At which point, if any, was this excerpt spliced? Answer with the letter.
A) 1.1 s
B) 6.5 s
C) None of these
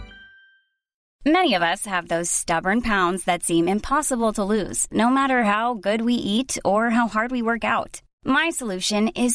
A